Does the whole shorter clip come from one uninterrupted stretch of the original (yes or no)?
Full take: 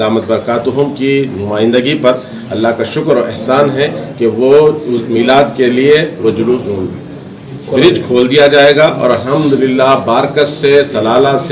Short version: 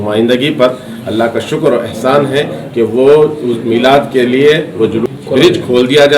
no